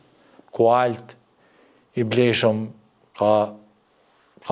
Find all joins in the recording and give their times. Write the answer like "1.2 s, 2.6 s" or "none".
none